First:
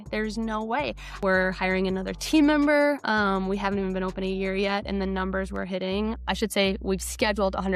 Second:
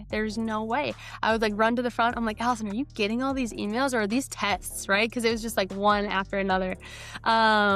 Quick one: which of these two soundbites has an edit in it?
first; 2 cuts; at 1.2 s, 6.2 s

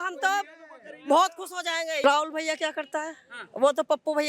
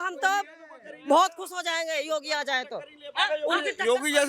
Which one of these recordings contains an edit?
first; 1 cut; at 2.0 s

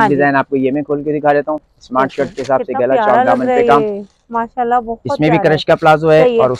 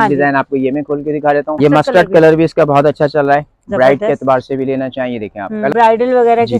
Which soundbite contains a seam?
second; 2 cuts; at 1.6 s, 5.7 s

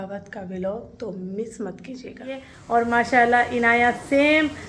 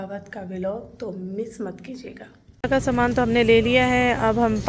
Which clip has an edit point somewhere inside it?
first; 1 cut; at 2.6 s

